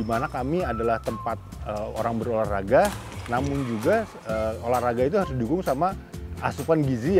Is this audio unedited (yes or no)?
yes